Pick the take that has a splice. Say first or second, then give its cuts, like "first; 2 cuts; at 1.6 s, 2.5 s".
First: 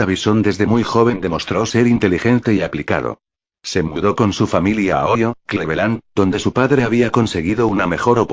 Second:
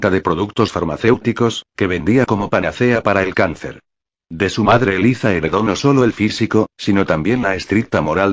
second; 1 cut; at 2.5 s